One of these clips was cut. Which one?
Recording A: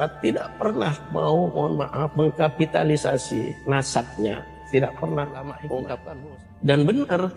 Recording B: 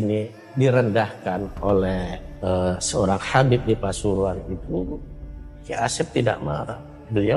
A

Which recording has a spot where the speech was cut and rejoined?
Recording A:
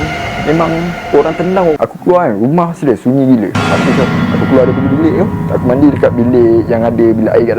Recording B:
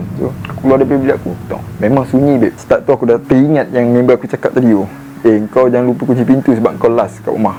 A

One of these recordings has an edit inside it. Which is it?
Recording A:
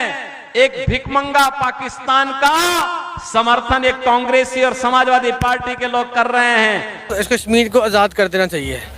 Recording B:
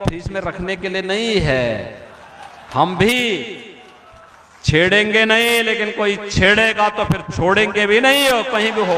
A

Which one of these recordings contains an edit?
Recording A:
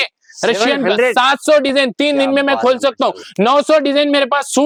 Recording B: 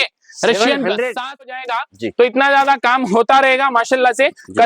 B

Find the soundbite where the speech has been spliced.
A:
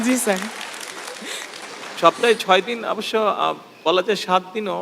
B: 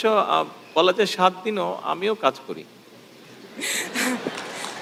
A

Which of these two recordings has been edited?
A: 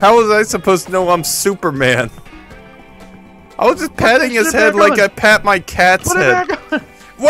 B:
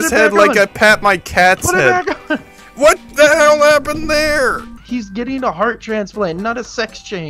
B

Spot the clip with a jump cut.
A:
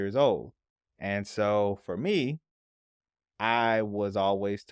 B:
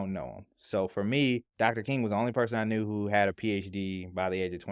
B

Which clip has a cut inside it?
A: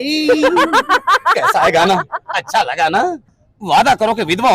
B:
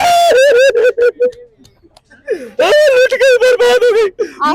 A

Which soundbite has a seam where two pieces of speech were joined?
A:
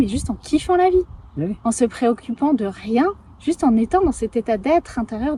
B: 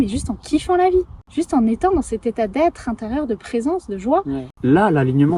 B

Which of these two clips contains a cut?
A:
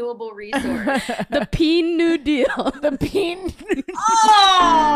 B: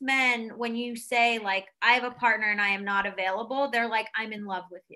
A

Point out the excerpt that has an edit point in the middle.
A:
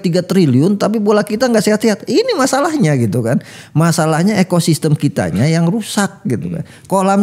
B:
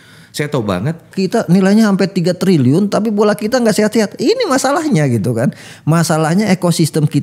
B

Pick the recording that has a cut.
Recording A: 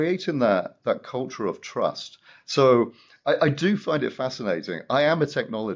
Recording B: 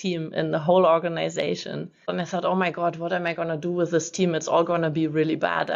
B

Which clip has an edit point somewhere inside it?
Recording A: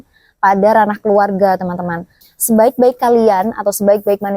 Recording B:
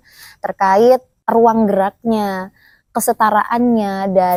A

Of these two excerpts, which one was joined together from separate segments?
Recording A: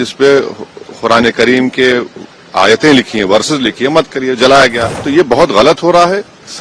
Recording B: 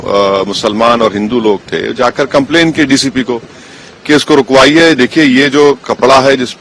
A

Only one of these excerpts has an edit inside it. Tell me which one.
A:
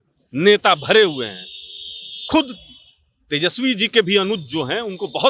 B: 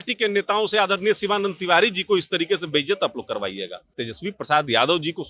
B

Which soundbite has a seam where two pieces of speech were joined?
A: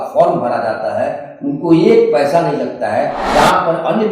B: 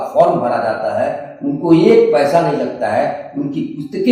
A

